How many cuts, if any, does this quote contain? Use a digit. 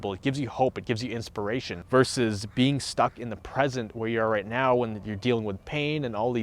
1